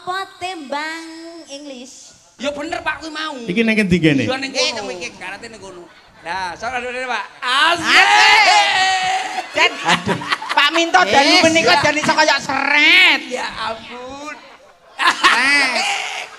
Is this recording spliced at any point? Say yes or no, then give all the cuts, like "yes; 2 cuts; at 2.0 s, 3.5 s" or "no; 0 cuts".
yes; 1 cut; at 2.3 s